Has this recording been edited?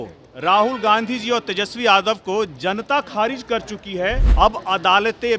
yes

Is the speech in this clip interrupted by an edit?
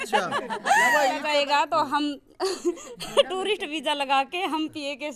yes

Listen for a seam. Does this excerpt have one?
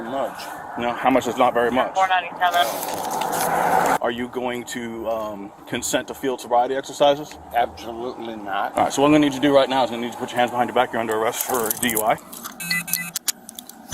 yes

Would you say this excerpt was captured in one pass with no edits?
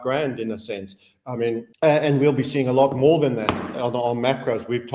no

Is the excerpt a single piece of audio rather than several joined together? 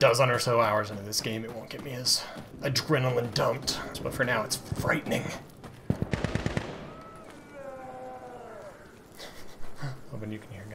no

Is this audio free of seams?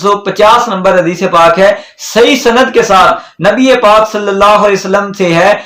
yes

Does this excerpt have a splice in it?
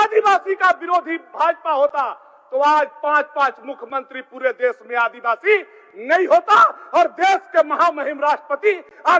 no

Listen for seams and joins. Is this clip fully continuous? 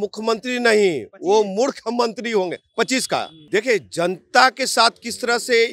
no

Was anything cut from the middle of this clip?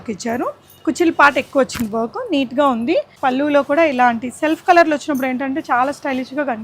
yes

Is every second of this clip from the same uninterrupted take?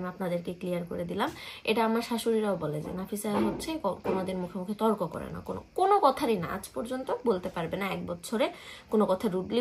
yes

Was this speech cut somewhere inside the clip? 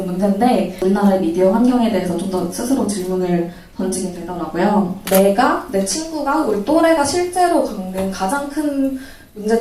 yes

